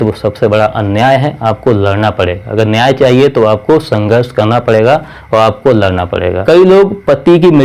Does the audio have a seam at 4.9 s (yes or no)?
no